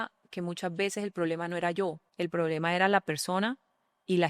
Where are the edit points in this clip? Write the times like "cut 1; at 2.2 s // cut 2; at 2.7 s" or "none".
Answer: cut 1; at 2.0 s